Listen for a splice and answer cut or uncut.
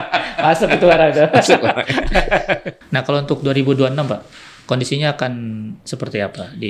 cut